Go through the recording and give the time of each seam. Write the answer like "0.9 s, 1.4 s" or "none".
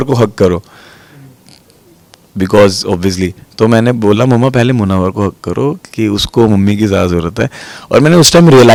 none